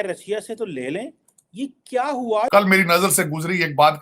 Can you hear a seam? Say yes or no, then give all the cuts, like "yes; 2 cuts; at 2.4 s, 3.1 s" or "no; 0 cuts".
yes; 1 cut; at 2.5 s